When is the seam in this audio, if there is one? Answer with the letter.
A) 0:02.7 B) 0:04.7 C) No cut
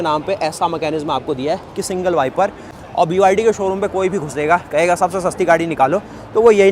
A